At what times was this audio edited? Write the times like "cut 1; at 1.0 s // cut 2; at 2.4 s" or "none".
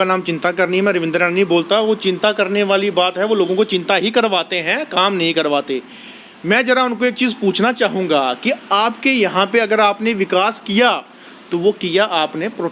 none